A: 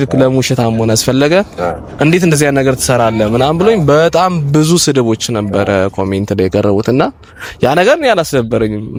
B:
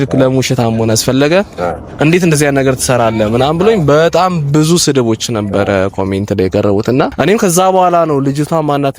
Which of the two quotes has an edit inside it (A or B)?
B